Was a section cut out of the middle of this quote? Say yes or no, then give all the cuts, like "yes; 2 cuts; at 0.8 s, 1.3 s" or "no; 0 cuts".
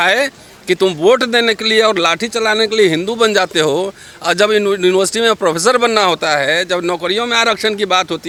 no; 0 cuts